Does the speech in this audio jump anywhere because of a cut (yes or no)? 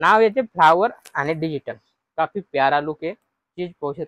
no